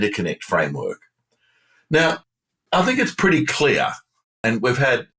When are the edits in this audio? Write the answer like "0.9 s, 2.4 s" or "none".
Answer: none